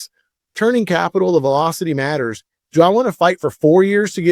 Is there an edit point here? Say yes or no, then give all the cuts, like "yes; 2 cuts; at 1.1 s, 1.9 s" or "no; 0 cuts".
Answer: no; 0 cuts